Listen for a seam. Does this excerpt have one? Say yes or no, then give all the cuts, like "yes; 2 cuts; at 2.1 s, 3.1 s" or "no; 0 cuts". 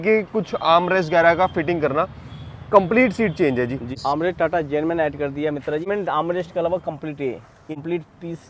yes; 3 cuts; at 3.9 s, 5.9 s, 7.7 s